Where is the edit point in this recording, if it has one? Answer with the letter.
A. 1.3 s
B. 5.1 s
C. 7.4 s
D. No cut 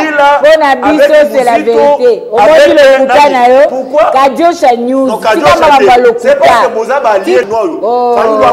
C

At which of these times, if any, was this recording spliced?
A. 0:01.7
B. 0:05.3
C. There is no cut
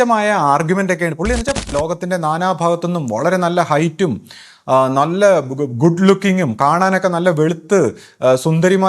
A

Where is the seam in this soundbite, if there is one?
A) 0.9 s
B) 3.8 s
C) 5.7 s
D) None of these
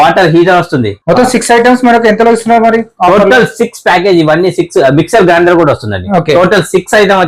A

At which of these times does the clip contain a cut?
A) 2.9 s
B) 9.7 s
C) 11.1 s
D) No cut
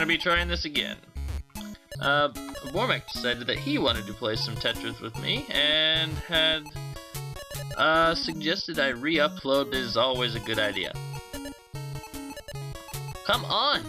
D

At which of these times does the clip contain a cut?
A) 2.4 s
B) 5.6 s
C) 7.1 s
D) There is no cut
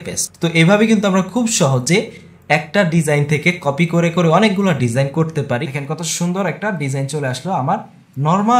B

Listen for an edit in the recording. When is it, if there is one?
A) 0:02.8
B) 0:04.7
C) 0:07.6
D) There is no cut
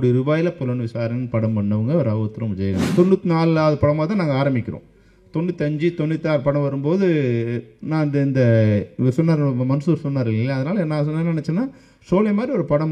A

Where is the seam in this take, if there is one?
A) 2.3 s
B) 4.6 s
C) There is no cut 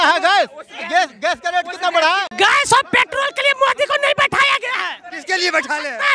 A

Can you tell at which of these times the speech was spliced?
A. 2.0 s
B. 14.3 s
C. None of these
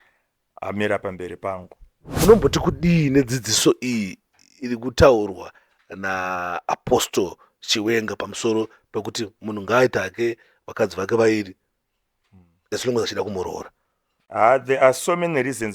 A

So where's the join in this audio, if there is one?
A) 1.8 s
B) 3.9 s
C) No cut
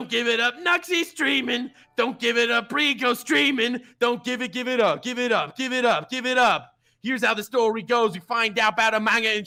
C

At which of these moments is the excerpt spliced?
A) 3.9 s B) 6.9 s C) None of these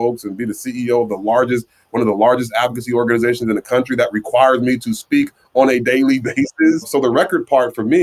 B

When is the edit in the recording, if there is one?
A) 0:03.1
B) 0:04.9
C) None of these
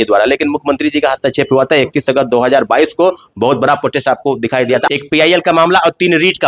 B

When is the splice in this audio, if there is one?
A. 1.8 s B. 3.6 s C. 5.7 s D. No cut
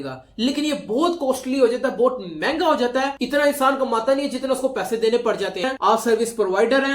C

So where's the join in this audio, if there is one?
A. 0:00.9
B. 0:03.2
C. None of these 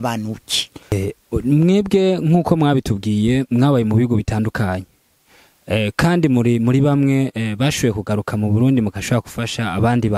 A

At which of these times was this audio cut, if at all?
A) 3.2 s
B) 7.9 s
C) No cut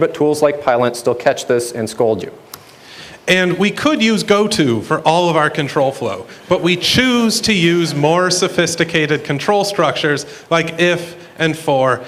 C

